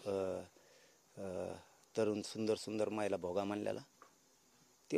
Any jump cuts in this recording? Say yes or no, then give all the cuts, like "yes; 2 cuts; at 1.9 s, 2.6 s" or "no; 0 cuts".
no; 0 cuts